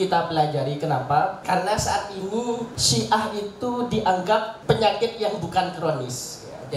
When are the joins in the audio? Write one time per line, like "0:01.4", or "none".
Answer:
0:01.4
0:02.8
0:04.5